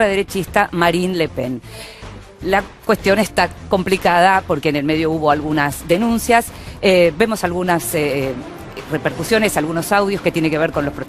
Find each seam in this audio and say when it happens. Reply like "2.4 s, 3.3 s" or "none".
none

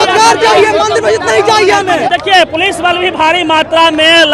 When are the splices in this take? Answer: 2.1 s

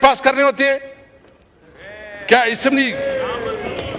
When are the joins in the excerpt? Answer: none

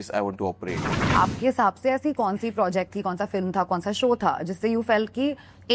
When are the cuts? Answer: 1.1 s

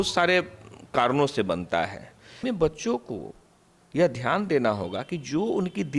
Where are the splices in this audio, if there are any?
2.4 s

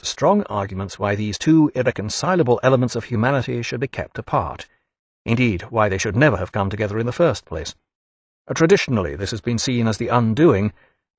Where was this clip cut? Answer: 6.4 s

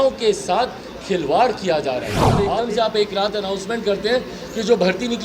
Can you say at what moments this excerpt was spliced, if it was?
2.4 s

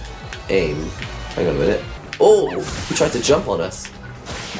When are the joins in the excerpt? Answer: 2.0 s

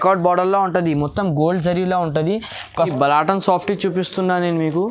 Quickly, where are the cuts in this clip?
2.8 s

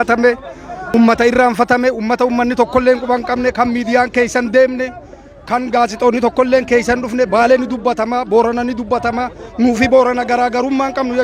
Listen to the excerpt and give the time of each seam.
0.9 s

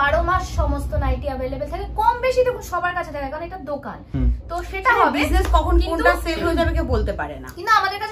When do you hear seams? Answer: none

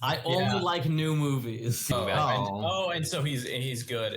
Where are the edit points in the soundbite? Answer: 1.9 s

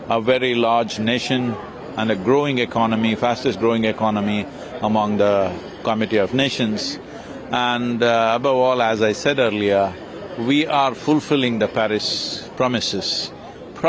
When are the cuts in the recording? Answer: none

